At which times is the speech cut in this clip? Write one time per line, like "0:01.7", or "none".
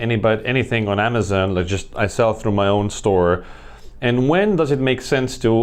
none